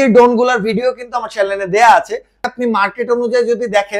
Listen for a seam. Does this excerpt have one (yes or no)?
yes